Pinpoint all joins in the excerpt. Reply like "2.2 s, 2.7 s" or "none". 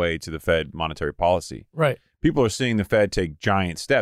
none